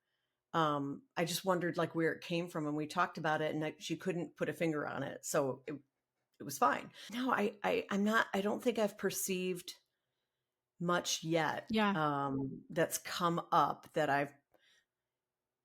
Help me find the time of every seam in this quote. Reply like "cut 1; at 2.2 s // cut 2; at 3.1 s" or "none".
cut 1; at 7.0 s